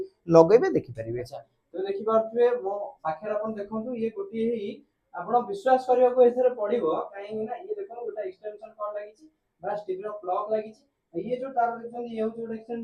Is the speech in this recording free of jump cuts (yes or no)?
yes